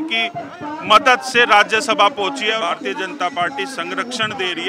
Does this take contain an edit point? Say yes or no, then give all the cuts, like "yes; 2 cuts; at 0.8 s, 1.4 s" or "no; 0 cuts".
yes; 1 cut; at 2.6 s